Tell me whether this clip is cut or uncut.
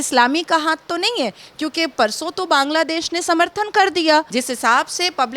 cut